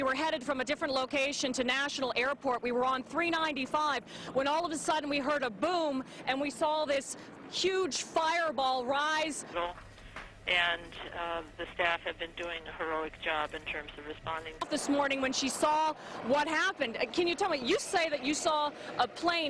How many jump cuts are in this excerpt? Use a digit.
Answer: 0